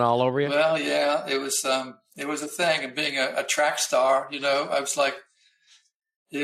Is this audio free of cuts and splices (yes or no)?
yes